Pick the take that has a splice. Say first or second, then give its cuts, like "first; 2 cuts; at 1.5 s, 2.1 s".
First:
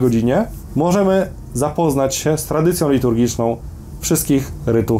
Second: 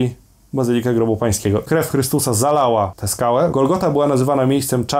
second; 2 cuts; at 1.6 s, 3.4 s